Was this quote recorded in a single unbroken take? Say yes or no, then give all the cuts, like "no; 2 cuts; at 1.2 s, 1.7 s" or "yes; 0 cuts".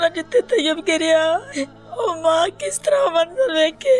no; 1 cut; at 1.5 s